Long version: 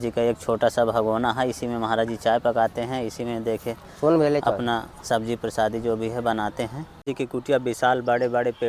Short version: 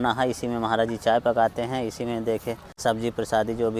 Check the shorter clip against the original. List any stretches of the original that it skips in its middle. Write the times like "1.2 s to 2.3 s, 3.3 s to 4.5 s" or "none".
3.9 s to 4.9 s